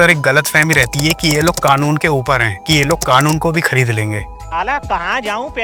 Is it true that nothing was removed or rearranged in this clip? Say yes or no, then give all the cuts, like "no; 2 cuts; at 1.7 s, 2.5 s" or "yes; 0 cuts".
yes; 0 cuts